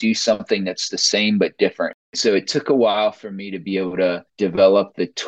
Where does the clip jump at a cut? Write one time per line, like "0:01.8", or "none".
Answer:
0:02.1
0:04.3